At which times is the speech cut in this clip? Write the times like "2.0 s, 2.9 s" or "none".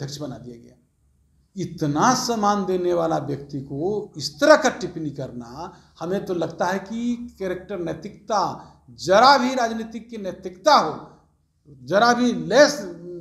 none